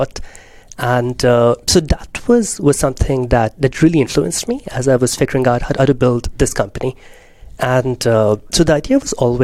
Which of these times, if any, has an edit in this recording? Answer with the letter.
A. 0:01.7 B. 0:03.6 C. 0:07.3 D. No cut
D